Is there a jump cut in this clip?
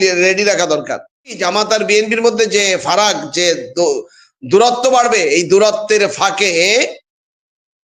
yes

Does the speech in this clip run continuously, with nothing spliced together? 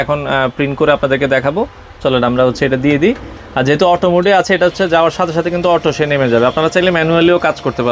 yes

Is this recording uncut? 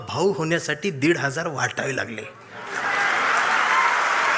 yes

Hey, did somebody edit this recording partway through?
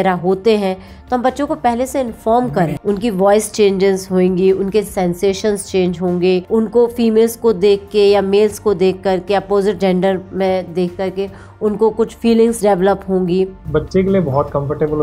yes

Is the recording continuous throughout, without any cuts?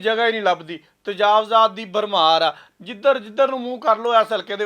no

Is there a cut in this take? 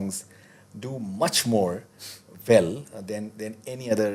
no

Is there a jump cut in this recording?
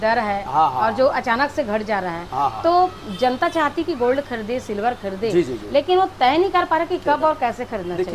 no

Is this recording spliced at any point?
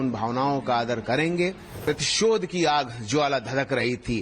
yes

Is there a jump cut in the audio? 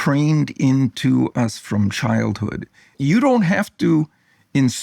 yes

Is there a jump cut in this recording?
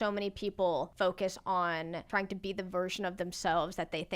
yes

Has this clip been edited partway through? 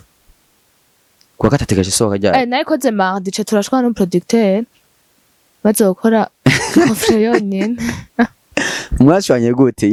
no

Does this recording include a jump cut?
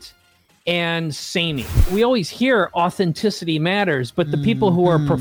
yes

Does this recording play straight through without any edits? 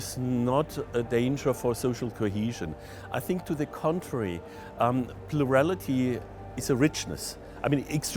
yes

